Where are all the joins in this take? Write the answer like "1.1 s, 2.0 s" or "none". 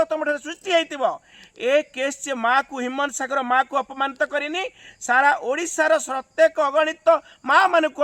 none